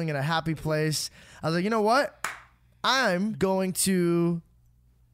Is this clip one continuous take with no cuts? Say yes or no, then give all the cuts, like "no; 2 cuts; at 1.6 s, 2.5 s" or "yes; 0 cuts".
no; 1 cut; at 3.4 s